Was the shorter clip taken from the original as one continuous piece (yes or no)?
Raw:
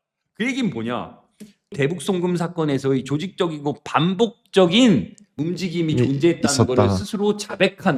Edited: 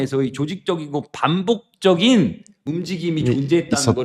yes